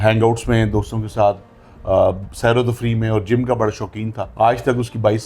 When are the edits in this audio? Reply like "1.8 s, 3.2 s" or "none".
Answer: 4.2 s